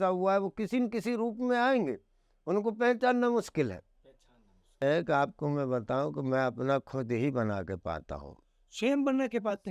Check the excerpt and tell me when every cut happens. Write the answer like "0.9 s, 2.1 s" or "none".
4.8 s

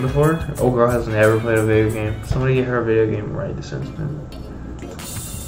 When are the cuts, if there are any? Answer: none

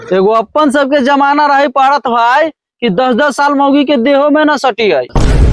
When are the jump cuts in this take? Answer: none

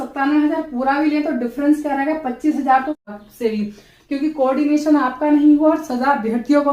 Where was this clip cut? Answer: 3.0 s

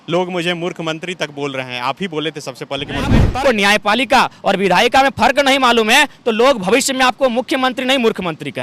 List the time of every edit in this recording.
3.2 s

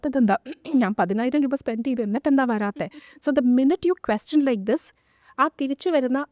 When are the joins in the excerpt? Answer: none

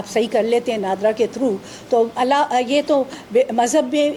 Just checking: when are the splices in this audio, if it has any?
none

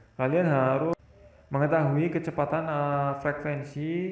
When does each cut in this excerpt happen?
0.9 s

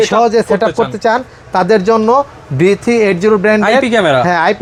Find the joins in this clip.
none

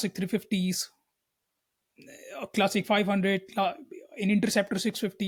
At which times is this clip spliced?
none

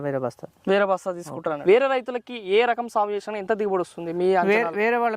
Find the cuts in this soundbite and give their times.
1.5 s

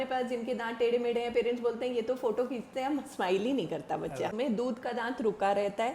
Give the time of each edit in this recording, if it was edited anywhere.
4.3 s

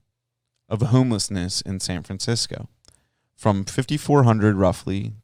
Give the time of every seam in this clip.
none

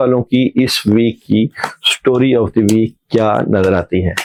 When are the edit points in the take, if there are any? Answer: none

